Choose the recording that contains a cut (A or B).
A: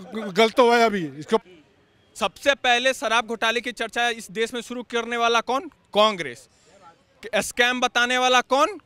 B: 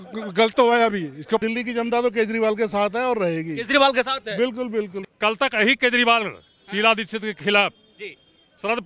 B